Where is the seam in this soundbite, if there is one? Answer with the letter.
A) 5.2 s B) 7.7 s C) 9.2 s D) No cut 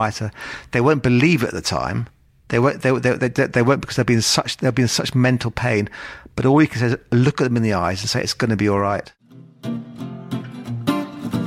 C